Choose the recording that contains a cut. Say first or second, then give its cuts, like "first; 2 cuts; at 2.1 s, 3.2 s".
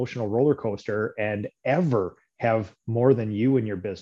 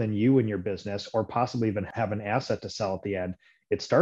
second; 1 cut; at 1.9 s